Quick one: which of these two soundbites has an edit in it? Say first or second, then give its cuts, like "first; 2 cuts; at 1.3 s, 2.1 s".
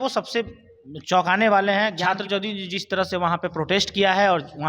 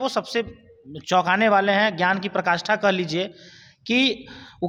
first; 1 cut; at 2.0 s